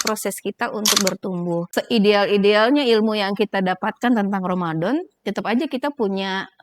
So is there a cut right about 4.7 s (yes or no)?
no